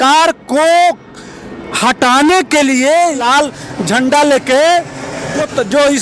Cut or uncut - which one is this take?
cut